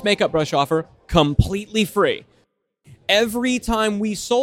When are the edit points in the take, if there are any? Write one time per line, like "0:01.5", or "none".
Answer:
0:02.7